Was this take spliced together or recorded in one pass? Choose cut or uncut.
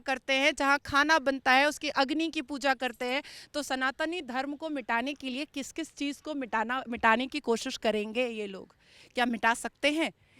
uncut